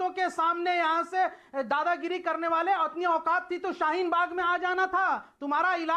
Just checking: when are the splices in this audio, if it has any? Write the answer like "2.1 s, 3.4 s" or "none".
none